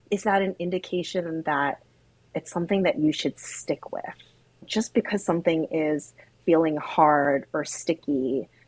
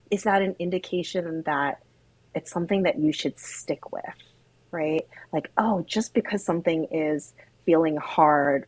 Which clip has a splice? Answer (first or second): first